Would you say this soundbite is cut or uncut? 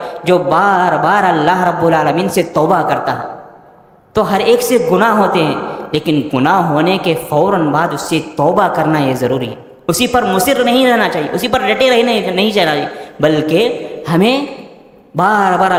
uncut